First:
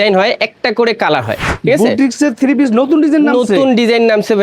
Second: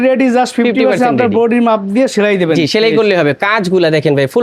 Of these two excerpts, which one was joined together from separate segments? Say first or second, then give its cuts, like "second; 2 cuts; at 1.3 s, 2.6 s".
first; 1 cut; at 1.5 s